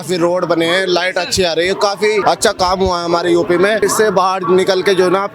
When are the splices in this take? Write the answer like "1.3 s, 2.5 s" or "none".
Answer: 2.2 s, 3.8 s